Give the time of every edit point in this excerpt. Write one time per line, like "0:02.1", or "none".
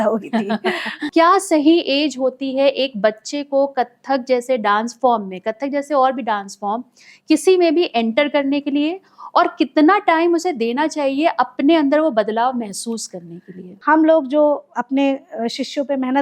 0:01.1
0:13.7

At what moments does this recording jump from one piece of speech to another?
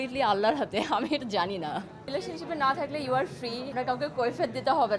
0:02.1
0:03.7

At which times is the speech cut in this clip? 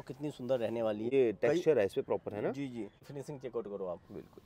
0:01.1
0:03.0

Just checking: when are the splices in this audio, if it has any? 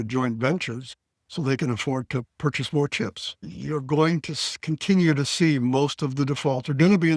0:03.5

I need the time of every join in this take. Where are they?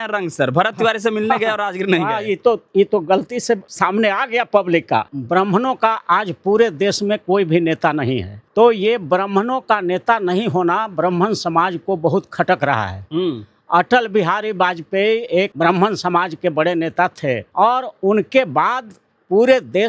0:03.7
0:05.1
0:08.4
0:15.5
0:17.5

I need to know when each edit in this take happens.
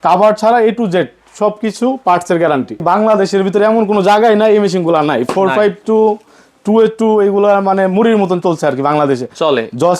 0:02.8

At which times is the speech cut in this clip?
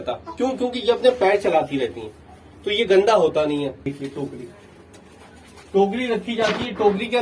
0:03.9

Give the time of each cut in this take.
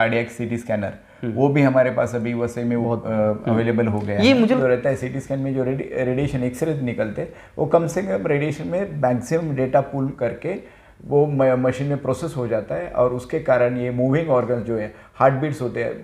0:04.6

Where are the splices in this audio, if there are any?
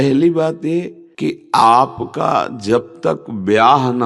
0:01.0

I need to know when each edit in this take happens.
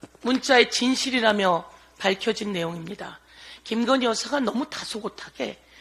none

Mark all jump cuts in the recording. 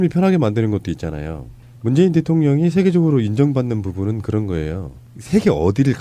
0:02.8

